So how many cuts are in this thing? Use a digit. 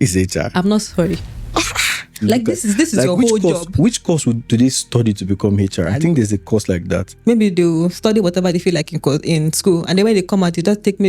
2